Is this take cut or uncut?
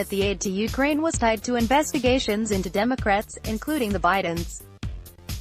cut